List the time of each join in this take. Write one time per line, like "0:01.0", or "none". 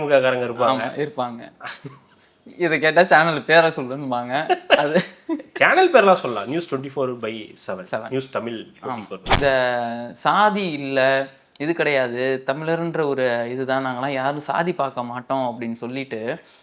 0:09.2